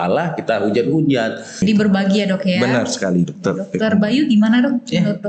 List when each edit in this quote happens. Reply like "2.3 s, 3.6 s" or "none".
1.6 s